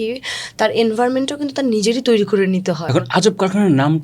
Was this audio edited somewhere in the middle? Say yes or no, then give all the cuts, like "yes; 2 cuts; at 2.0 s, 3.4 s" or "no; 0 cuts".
yes; 1 cut; at 2.8 s